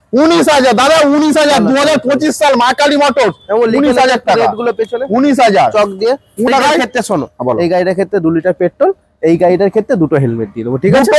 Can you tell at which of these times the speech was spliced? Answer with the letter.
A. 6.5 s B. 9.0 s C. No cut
A